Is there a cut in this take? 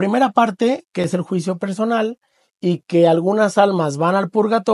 no; 0 cuts

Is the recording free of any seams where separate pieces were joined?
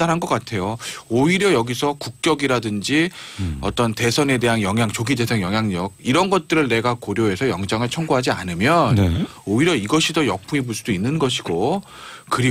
yes; 0 cuts

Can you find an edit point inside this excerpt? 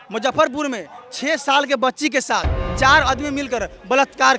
no; 0 cuts

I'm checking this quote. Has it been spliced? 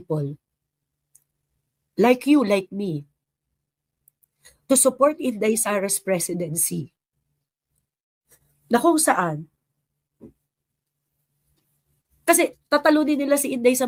no; 0 cuts

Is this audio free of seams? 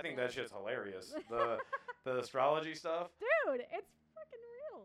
yes; 0 cuts

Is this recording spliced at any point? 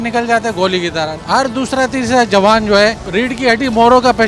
yes; 2 cuts; at 1.2 s, 3.0 s

